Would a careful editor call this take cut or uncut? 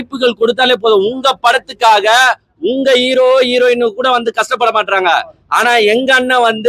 uncut